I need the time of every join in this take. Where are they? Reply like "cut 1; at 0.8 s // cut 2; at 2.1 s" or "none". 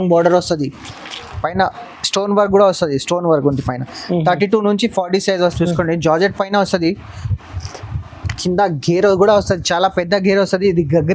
cut 1; at 5.5 s